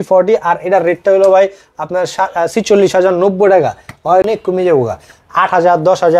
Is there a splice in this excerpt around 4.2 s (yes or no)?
yes